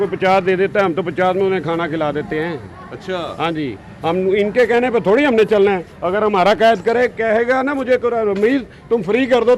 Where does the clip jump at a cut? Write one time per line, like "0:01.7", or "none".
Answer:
none